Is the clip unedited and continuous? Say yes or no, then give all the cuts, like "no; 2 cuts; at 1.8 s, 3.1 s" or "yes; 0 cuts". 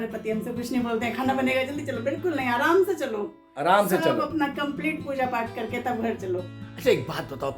no; 1 cut; at 6.5 s